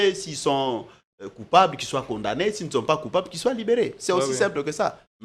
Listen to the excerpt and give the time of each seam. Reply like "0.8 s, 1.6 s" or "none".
none